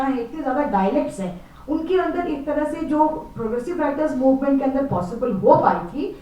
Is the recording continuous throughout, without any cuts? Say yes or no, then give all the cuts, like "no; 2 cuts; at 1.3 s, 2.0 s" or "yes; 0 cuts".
yes; 0 cuts